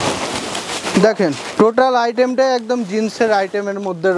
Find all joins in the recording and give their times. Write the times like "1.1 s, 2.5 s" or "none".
1.5 s